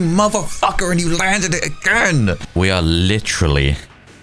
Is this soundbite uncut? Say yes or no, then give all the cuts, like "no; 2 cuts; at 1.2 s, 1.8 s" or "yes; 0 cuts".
no; 1 cut; at 2.4 s